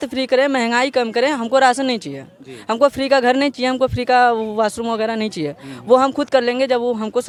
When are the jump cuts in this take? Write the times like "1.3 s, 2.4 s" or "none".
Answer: none